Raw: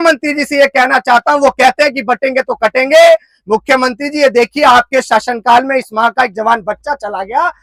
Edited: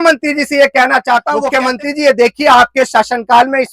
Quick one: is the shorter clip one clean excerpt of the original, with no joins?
no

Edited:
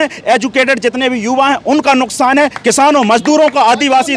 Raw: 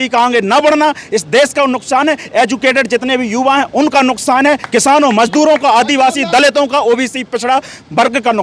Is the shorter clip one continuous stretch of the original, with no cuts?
yes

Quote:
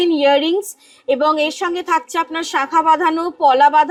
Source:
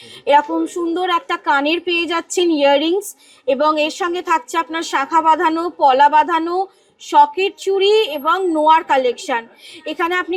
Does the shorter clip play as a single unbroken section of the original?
yes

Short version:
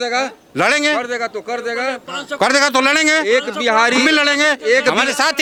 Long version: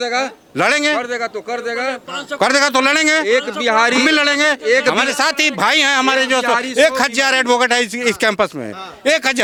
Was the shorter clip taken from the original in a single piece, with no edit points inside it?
yes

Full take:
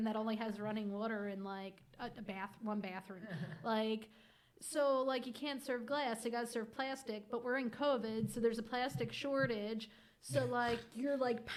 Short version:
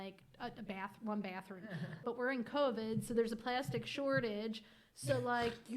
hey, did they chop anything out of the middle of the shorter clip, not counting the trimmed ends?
yes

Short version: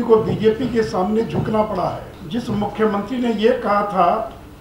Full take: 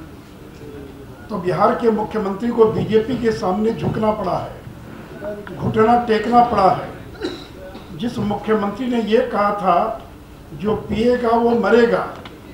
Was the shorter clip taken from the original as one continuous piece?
no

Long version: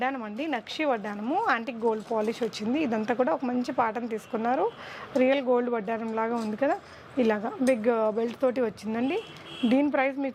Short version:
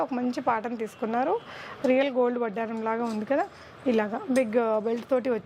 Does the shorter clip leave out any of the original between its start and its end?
no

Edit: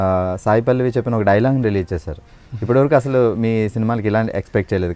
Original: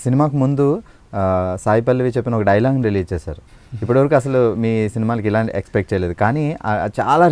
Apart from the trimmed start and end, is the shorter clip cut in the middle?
no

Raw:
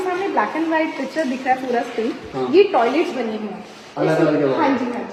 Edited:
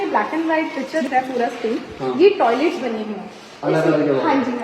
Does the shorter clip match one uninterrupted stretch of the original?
no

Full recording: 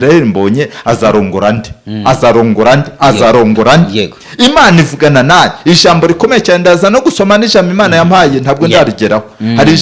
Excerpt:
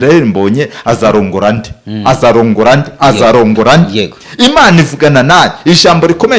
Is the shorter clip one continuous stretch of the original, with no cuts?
yes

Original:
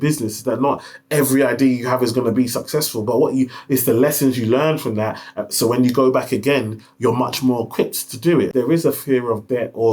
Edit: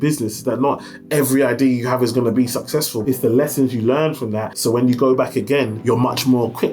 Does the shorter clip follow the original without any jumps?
no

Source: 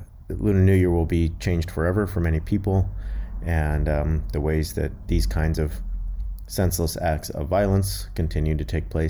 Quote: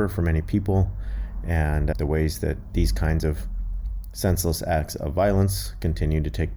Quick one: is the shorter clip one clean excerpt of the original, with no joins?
no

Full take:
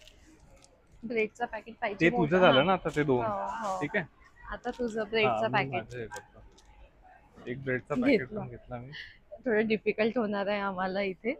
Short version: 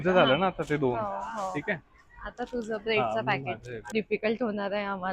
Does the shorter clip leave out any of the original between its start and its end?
yes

